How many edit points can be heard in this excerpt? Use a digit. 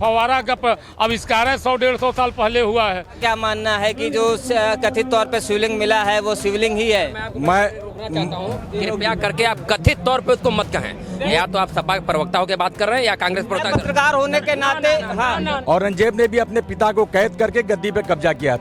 3